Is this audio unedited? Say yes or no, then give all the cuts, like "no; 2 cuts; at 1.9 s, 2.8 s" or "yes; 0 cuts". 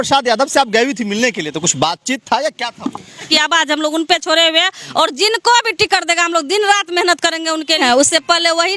no; 2 cuts; at 3.2 s, 7.8 s